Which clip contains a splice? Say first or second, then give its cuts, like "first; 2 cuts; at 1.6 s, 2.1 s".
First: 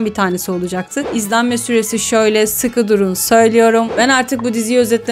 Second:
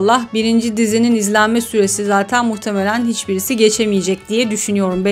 first; 2 cuts; at 1.0 s, 3.9 s